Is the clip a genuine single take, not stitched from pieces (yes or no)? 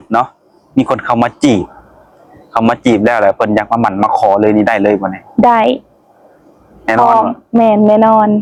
yes